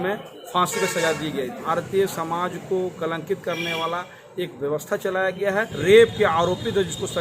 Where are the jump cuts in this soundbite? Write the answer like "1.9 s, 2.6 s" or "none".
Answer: 1.6 s, 5.7 s